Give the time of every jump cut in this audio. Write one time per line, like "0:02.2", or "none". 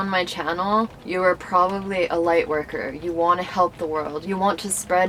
0:01.0